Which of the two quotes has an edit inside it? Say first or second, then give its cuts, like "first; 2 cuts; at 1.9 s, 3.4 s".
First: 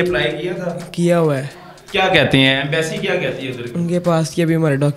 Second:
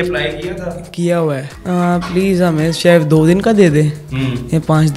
second; 1 cut; at 1.5 s